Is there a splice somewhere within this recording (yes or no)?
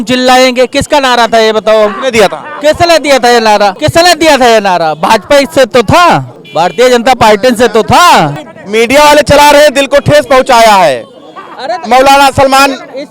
no